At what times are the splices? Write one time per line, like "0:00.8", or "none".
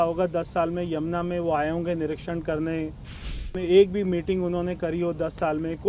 0:03.5